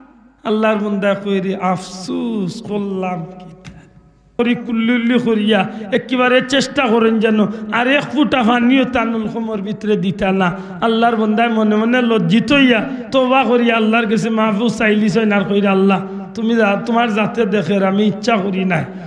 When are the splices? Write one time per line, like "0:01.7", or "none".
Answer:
0:04.4